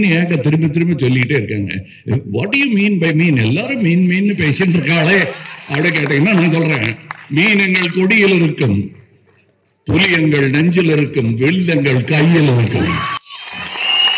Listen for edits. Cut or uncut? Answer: uncut